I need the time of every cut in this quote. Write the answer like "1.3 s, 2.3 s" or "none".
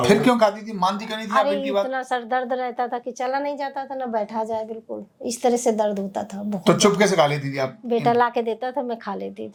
none